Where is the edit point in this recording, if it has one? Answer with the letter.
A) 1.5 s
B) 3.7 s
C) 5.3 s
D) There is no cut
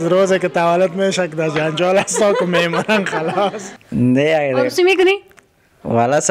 B